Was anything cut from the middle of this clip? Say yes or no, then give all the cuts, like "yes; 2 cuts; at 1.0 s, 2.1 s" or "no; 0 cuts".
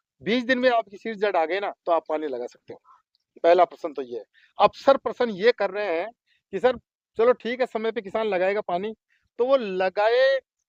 no; 0 cuts